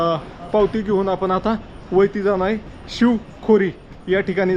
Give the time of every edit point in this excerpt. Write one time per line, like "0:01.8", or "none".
none